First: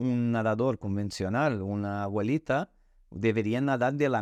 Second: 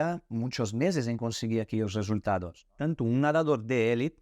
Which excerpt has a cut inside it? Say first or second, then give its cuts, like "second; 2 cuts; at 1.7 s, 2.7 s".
second; 1 cut; at 2.6 s